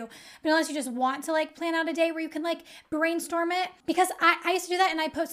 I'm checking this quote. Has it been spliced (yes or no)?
yes